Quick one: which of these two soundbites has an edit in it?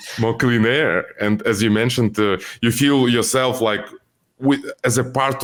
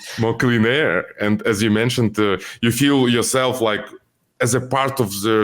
second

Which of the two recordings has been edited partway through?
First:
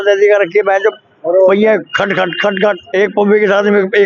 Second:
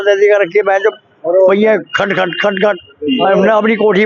first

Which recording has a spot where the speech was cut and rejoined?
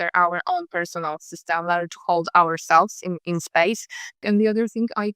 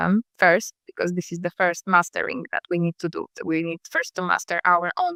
first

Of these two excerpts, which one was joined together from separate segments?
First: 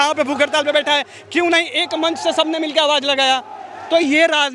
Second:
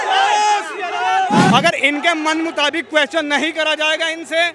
second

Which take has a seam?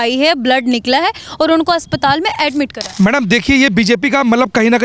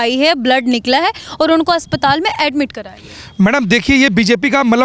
first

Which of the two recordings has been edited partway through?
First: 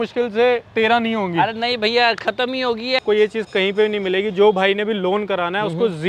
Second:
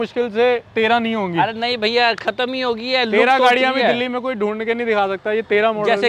first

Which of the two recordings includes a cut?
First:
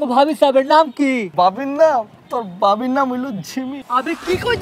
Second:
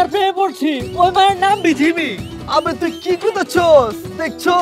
first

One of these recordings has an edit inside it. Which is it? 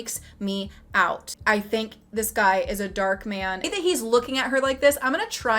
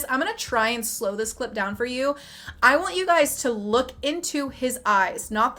first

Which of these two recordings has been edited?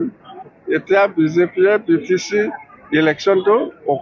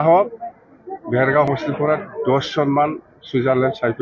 second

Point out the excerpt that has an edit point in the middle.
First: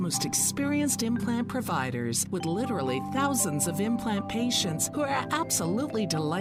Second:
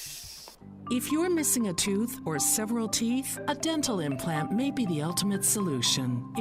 second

